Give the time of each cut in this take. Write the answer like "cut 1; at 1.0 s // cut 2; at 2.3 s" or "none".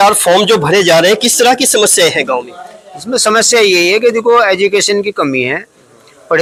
none